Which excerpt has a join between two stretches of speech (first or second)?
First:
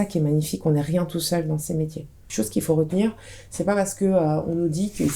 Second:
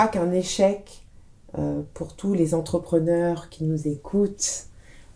first